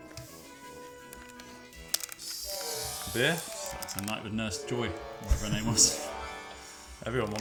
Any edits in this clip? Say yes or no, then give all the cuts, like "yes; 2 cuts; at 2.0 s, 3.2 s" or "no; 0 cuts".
no; 0 cuts